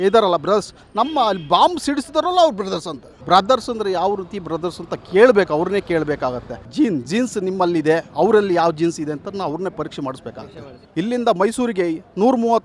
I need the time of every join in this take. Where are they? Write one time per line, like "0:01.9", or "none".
0:03.1
0:06.6
0:10.8